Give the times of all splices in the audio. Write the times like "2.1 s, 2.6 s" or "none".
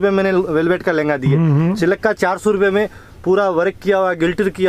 none